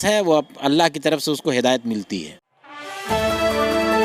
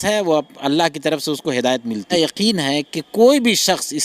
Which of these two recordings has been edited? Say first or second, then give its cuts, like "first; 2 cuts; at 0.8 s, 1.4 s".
second; 1 cut; at 2.1 s